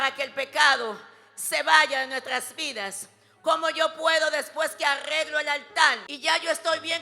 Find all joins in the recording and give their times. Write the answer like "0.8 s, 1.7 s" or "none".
6.1 s